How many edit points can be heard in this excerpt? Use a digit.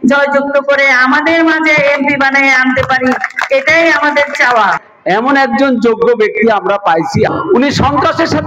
0